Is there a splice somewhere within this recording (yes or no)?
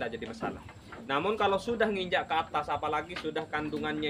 no